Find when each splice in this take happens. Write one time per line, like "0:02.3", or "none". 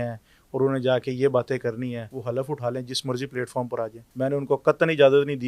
0:02.1
0:04.0